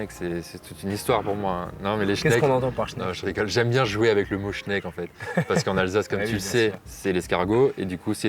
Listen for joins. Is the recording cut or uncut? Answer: uncut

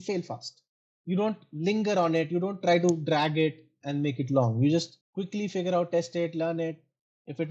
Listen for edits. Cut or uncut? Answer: uncut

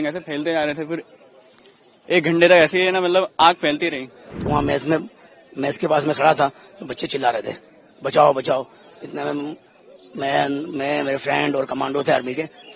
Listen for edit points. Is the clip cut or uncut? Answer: cut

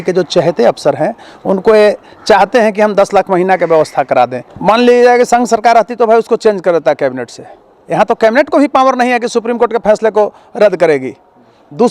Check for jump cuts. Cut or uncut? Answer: cut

